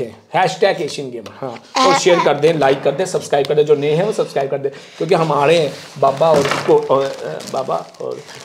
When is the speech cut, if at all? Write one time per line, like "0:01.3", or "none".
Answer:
none